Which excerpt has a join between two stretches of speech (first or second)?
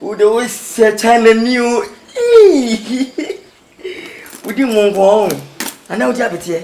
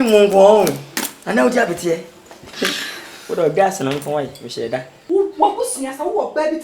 second